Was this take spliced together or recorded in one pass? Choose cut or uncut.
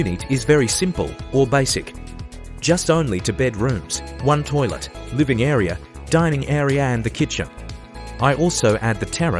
uncut